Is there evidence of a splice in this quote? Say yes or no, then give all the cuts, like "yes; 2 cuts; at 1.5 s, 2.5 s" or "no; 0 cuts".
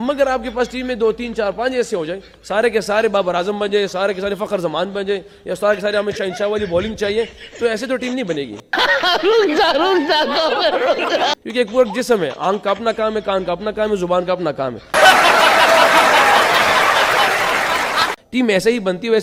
no; 0 cuts